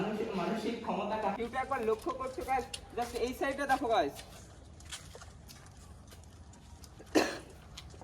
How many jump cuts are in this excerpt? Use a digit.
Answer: 1